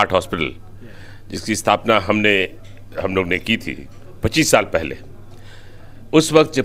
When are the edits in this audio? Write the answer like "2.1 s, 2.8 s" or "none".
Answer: none